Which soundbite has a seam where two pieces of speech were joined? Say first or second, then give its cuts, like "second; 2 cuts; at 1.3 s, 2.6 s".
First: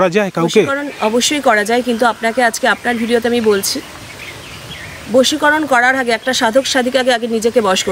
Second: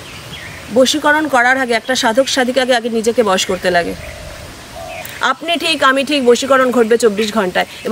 second; 1 cut; at 5.1 s